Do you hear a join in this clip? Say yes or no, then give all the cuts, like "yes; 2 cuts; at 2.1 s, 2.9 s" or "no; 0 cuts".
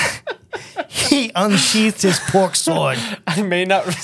no; 0 cuts